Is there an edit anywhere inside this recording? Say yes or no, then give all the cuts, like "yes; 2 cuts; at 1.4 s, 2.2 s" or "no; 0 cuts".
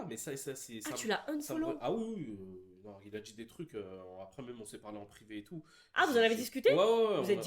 no; 0 cuts